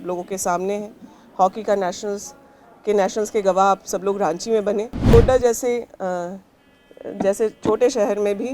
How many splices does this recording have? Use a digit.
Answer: 1